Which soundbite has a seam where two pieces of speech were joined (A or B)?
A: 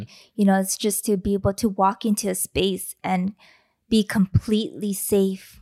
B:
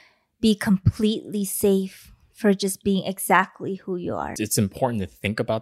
B